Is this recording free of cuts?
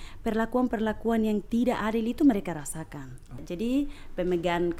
no; 1 cut; at 3.4 s

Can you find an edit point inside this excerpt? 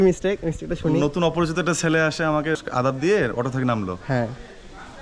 yes; 1 cut; at 2.6 s

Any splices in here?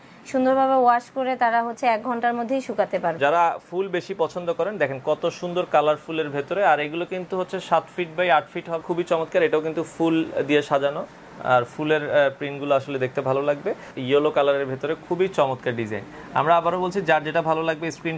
yes; 3 cuts; at 3.2 s, 8.8 s, 13.9 s

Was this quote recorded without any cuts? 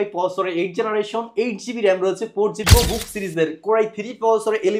no; 1 cut; at 2.6 s

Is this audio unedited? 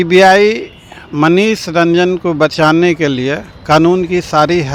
yes; 0 cuts

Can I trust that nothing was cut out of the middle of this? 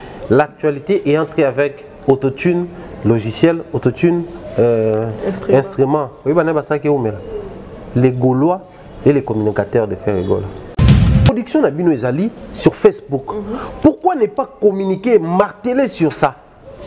no; 1 cut; at 11.0 s

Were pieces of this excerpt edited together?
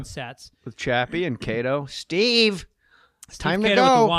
yes; 1 cut; at 1.9 s

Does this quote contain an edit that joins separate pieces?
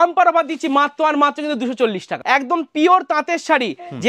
yes; 1 cut; at 2.1 s

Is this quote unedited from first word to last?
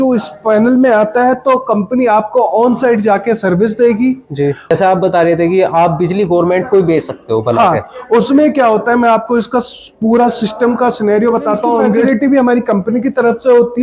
no; 2 cuts; at 4.7 s, 12.0 s

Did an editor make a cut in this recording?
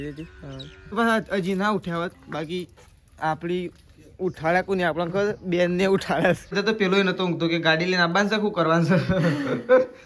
yes; 2 cuts; at 0.9 s, 6.5 s

